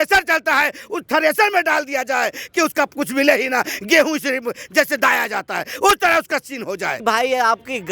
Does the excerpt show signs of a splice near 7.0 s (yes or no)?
yes